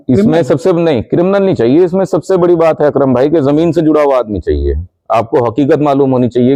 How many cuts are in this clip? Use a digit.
0